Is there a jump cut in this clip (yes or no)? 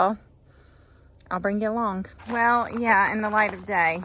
yes